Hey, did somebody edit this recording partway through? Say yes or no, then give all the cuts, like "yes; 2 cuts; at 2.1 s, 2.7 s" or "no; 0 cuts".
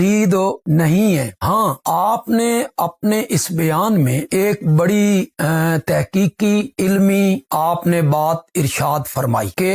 no; 0 cuts